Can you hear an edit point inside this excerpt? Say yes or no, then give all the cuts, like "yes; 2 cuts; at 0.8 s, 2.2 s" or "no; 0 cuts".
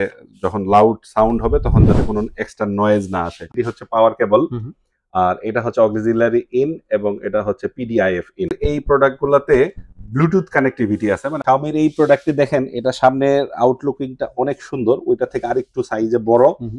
yes; 3 cuts; at 3.5 s, 8.5 s, 11.3 s